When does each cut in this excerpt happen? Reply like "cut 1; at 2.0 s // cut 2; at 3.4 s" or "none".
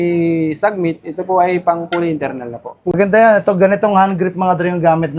cut 1; at 2.9 s